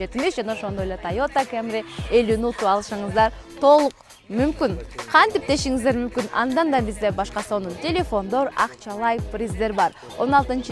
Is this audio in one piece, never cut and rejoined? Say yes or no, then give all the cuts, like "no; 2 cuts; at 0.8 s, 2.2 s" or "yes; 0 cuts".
yes; 0 cuts